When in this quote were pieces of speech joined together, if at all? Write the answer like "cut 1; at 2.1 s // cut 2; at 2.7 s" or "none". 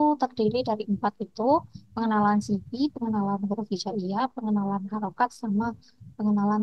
none